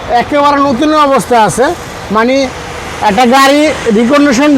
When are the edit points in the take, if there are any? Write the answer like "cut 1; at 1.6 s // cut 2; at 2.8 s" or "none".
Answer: none